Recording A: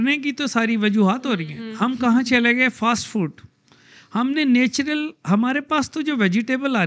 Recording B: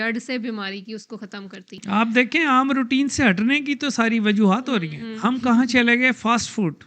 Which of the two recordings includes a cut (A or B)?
B